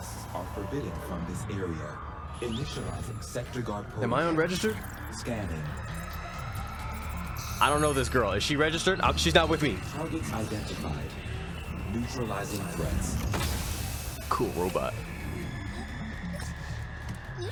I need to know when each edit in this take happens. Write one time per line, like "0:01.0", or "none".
none